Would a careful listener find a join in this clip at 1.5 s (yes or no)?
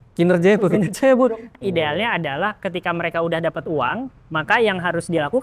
yes